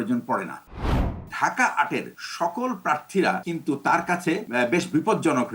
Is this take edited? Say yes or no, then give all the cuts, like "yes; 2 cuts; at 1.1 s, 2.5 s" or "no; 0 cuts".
yes; 4 cuts; at 1.0 s, 2.2 s, 3.5 s, 4.5 s